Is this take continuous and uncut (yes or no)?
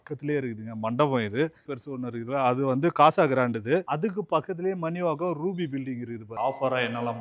no